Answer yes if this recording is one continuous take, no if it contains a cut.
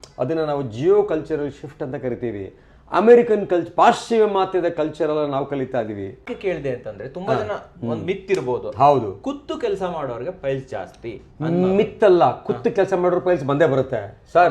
no